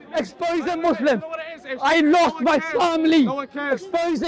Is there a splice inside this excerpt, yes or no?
no